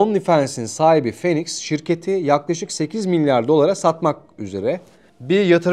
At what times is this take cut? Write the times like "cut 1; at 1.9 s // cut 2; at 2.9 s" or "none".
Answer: none